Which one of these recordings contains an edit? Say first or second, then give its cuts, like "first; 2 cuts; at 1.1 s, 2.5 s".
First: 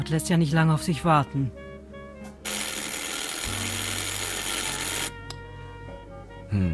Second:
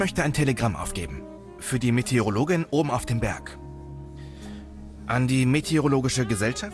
second; 2 cuts; at 3.4 s, 5.1 s